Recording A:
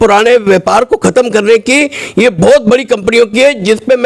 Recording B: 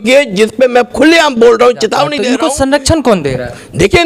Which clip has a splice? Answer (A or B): B